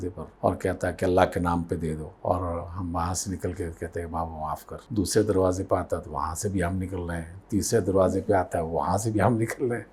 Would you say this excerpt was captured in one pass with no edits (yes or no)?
yes